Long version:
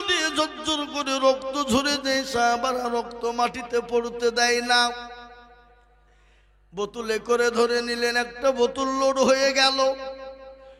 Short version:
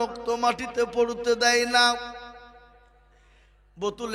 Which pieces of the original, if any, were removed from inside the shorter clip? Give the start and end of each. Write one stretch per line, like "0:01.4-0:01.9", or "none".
none